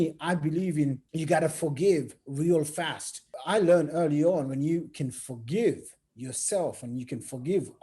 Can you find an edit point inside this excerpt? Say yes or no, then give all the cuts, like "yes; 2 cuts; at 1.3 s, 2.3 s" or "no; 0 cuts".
yes; 2 cuts; at 1.1 s, 3.3 s